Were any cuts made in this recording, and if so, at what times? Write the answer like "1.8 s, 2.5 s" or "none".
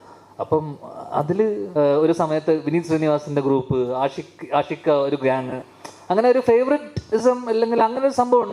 1.6 s